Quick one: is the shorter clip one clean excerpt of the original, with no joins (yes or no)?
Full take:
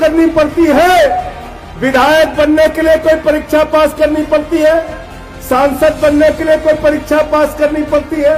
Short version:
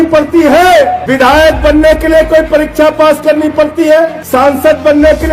no